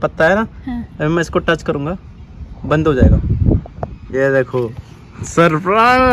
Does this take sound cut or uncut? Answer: uncut